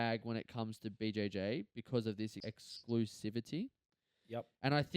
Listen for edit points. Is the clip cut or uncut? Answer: cut